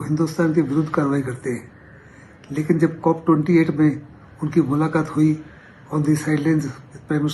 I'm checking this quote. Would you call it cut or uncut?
uncut